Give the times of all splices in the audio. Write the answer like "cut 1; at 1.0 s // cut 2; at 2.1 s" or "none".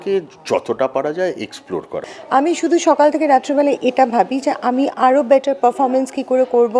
cut 1; at 2.1 s